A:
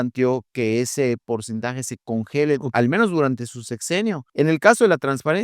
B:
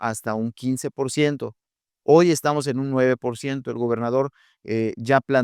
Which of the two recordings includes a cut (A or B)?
A